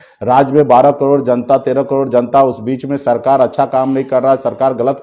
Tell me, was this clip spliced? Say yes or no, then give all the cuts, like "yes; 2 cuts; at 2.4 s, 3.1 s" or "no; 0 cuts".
no; 0 cuts